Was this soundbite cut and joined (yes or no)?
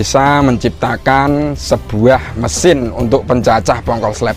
no